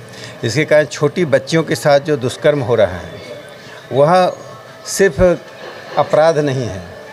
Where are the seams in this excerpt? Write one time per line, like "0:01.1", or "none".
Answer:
none